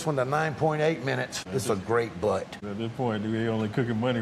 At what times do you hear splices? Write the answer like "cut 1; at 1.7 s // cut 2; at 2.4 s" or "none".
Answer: cut 1; at 1.4 s // cut 2; at 2.6 s